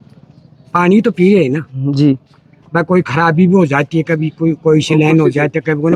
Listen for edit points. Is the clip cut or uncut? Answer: uncut